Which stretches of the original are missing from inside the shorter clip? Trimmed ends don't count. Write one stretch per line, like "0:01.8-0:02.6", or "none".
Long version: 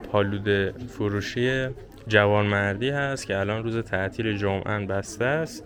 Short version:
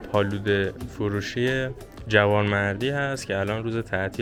none